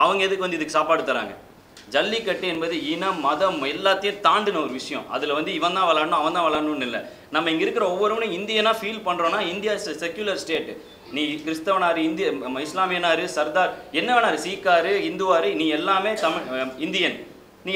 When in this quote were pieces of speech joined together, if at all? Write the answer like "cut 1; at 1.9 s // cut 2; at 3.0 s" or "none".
none